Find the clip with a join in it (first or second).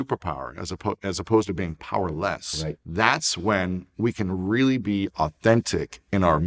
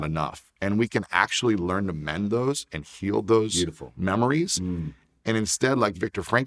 first